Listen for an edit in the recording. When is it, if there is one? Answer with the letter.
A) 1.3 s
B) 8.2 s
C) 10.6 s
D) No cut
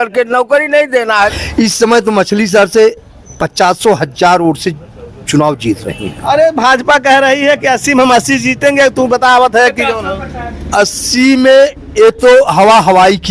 A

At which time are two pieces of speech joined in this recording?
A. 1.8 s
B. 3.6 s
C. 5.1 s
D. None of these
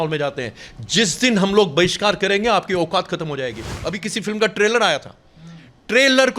B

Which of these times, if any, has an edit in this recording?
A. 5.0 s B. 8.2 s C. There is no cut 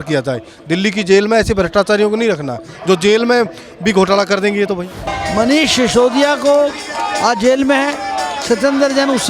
A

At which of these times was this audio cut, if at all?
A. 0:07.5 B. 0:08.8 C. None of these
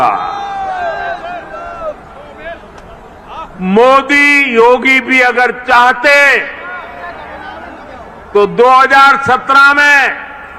C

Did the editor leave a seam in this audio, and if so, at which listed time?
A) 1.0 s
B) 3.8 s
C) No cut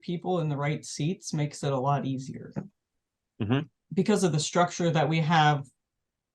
B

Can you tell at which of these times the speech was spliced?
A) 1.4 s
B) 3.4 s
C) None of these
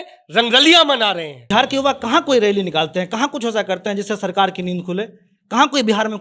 A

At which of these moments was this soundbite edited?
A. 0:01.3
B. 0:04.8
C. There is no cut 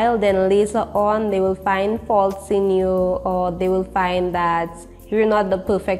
C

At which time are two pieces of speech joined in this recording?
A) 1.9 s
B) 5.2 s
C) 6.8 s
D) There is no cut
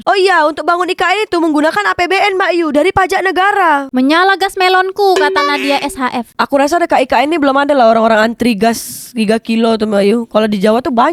D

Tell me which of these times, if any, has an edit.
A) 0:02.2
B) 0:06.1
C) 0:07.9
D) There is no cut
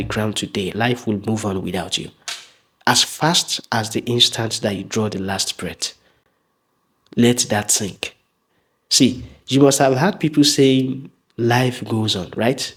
D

